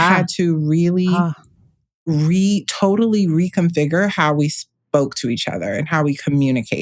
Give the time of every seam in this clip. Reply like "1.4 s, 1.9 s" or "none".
none